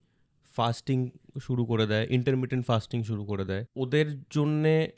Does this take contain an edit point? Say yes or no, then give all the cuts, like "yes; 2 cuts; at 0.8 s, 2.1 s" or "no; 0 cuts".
yes; 1 cut; at 3.7 s